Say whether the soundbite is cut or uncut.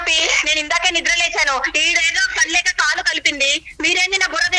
uncut